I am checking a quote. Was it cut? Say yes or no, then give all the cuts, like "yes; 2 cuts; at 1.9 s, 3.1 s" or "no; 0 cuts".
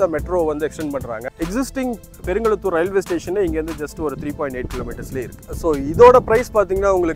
yes; 2 cuts; at 1.2 s, 5.5 s